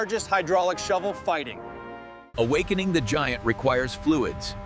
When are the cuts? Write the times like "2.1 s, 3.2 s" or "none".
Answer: 2.3 s